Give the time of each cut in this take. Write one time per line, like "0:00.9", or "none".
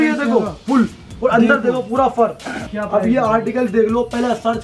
0:02.6